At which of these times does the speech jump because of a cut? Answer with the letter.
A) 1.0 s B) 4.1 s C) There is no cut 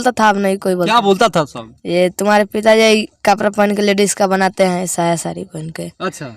C